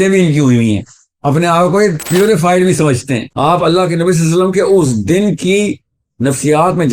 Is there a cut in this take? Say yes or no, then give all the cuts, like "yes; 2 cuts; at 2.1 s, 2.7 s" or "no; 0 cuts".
yes; 1 cut; at 3.3 s